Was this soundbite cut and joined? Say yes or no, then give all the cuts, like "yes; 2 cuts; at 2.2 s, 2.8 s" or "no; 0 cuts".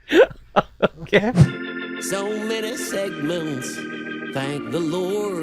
yes; 1 cut; at 1.5 s